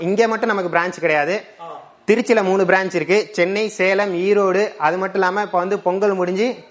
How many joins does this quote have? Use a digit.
0